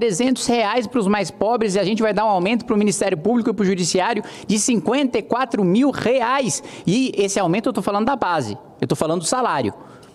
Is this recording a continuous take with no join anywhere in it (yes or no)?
yes